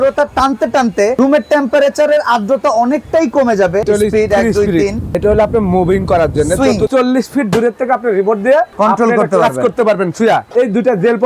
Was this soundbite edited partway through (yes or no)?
yes